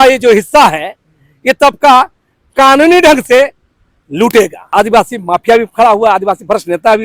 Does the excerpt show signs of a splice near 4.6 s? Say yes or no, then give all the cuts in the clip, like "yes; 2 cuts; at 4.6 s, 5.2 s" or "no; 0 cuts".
yes; 1 cut; at 4.6 s